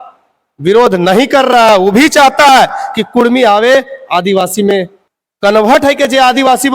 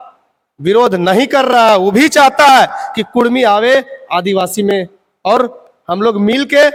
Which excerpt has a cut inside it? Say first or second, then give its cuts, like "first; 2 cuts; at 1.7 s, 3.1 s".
first; 1 cut; at 5.0 s